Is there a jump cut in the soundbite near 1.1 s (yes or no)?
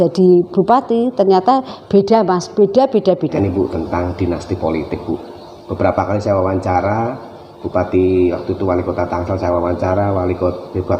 no